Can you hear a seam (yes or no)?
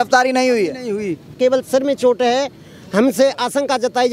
yes